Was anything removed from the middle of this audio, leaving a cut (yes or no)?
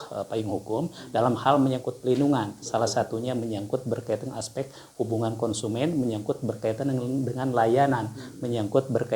no